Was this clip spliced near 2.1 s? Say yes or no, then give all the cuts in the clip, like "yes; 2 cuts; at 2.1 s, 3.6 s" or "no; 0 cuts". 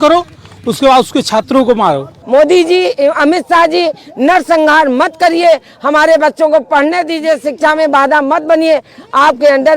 yes; 1 cut; at 2.1 s